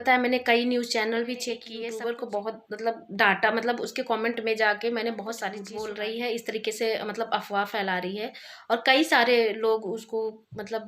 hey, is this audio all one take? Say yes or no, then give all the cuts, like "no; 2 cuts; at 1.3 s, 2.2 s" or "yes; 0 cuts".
no; 2 cuts; at 1.7 s, 5.7 s